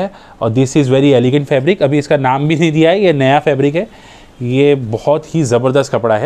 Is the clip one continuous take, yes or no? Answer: yes